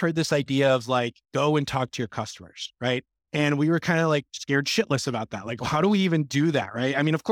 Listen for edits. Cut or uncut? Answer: uncut